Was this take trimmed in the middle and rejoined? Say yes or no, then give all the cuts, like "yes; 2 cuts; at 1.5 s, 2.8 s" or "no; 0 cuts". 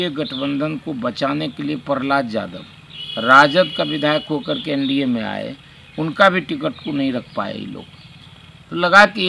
no; 0 cuts